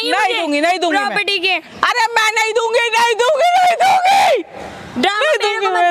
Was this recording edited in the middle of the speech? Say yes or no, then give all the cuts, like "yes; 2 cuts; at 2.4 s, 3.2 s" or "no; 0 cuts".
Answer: no; 0 cuts